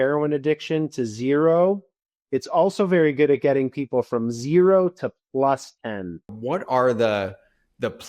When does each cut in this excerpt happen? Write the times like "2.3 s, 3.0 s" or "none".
6.3 s